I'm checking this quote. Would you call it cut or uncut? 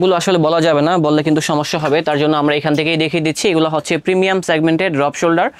uncut